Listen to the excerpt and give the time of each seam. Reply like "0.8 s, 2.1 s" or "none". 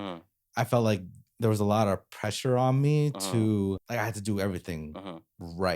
3.8 s